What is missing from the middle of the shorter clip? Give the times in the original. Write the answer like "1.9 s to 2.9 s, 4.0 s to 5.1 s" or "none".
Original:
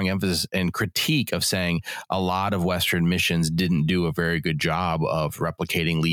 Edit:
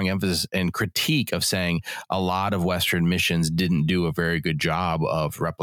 none